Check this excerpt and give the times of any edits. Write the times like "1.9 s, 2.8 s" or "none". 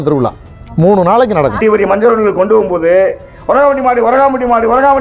1.6 s